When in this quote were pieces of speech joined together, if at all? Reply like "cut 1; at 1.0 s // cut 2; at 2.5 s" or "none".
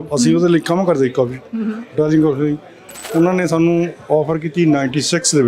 cut 1; at 3.0 s